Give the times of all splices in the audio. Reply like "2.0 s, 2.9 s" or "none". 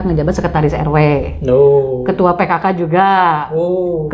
none